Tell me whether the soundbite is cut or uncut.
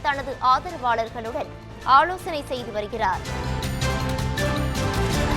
cut